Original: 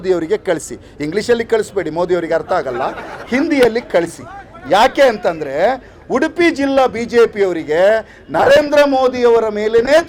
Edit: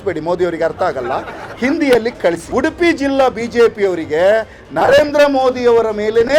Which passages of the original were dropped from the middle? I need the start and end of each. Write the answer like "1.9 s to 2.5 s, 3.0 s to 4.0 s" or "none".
4.1 s to 6.0 s